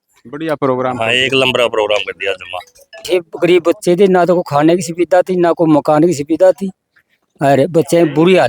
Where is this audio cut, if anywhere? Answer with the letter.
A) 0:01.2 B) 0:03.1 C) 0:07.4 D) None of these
B